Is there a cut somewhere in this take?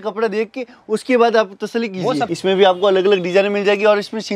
yes; 1 cut; at 2.3 s

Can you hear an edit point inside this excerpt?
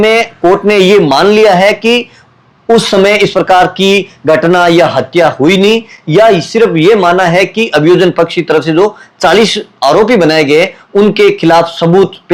no; 0 cuts

